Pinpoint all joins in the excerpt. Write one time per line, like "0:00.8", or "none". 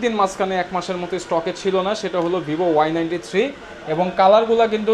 none